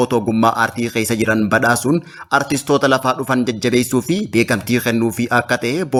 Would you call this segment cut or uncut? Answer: uncut